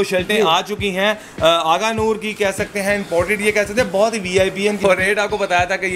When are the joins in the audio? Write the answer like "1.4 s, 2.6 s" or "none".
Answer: 4.8 s